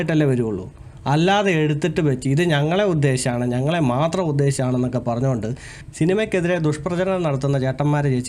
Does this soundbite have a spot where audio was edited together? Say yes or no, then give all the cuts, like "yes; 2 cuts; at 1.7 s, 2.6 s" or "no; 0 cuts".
yes; 1 cut; at 5.7 s